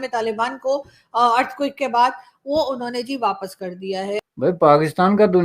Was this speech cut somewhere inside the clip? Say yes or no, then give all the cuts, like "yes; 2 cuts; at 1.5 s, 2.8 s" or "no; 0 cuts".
yes; 1 cut; at 4.2 s